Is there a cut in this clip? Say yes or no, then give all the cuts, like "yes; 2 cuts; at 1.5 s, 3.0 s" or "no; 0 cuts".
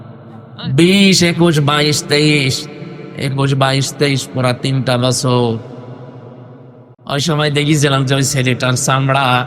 yes; 1 cut; at 6.9 s